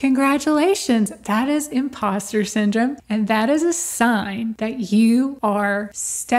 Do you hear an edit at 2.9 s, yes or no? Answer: no